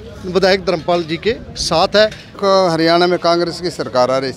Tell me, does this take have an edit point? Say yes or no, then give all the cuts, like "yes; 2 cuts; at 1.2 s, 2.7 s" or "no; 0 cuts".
yes; 1 cut; at 2.3 s